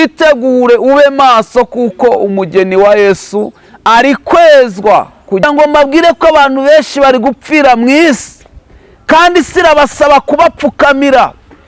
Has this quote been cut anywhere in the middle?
yes; 1 cut; at 5.4 s

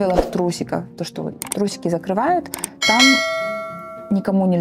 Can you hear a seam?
no; 0 cuts

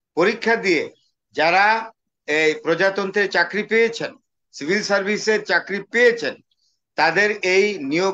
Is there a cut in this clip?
no; 0 cuts

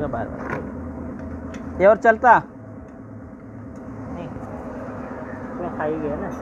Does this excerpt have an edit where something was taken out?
no; 0 cuts

